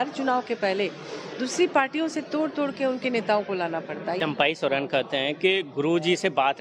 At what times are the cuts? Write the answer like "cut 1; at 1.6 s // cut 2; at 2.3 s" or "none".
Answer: cut 1; at 4.2 s